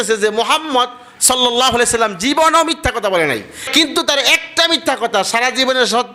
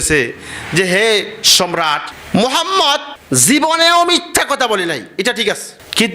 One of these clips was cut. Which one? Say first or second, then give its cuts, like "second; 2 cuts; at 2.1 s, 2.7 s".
second; 1 cut; at 3.1 s